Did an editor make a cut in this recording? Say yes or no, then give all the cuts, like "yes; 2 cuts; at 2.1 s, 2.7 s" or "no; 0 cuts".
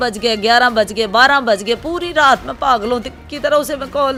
no; 0 cuts